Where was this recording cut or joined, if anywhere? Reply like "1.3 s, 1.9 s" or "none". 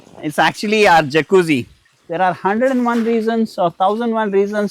2.0 s